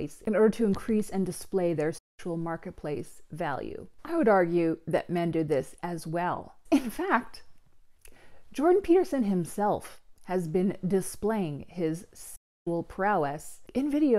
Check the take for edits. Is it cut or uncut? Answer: uncut